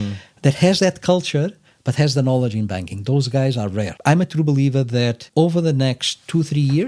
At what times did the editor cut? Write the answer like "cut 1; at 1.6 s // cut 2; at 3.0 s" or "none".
cut 1; at 3.9 s // cut 2; at 5.2 s